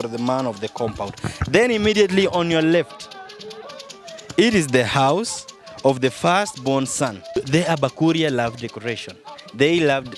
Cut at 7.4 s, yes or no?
yes